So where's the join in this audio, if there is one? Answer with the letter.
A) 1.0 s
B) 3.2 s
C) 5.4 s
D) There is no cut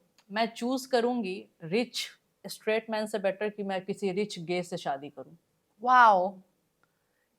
D